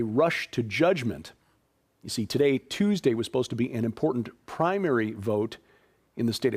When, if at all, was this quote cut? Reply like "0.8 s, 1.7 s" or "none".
none